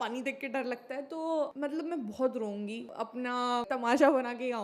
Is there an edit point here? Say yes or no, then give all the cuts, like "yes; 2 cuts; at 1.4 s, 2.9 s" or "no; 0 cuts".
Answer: yes; 2 cuts; at 1.5 s, 3.2 s